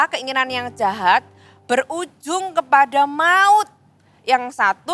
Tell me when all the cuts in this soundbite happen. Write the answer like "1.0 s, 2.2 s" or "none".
none

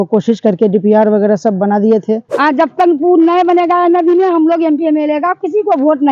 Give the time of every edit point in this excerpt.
1.9 s

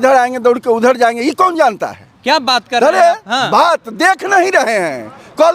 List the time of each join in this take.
none

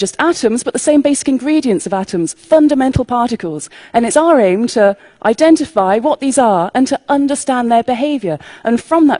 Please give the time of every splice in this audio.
none

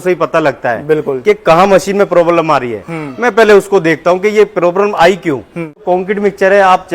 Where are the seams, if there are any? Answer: 5.8 s

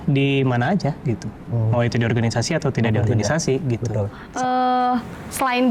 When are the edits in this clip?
4.2 s

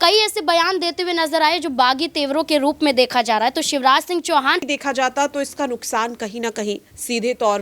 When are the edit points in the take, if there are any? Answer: 4.7 s

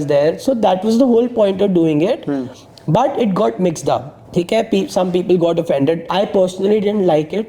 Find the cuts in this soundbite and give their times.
4.2 s, 6.0 s

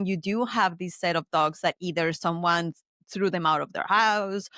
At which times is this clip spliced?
none

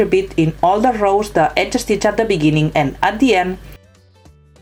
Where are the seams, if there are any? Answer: 3.7 s

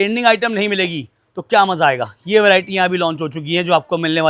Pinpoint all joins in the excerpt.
none

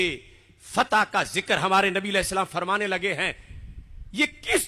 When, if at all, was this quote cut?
none

